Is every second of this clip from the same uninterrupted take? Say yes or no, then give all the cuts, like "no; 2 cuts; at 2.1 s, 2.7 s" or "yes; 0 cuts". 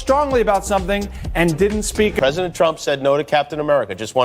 no; 1 cut; at 2.2 s